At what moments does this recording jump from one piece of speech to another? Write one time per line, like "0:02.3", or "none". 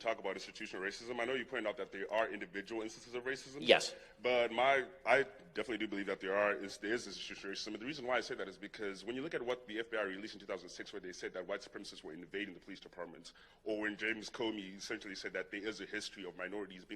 0:03.6